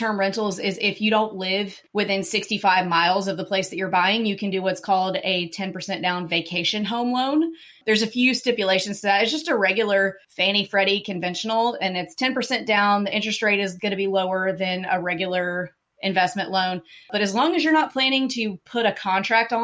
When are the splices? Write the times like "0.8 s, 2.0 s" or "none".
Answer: 1.8 s, 10.3 s